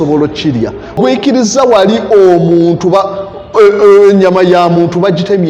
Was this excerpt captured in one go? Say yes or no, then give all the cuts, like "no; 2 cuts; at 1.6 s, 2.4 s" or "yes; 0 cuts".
no; 1 cut; at 1.0 s